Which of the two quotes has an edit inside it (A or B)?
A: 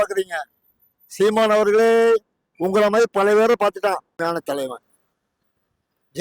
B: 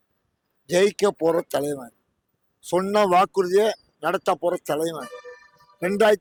A